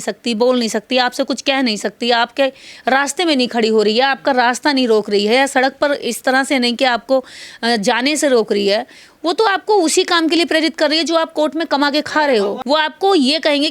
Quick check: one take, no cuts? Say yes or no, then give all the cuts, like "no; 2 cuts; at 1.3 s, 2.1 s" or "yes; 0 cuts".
no; 1 cut; at 12.6 s